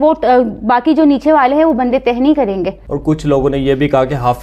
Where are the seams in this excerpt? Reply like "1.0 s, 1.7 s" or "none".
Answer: 2.8 s